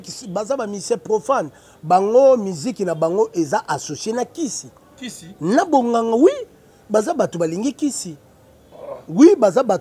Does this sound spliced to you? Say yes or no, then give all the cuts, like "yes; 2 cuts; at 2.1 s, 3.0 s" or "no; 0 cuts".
no; 0 cuts